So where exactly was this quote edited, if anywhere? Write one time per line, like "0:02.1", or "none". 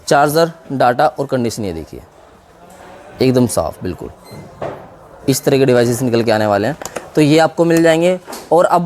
none